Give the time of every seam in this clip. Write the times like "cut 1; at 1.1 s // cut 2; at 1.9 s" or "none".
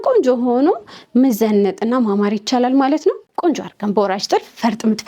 cut 1; at 3.2 s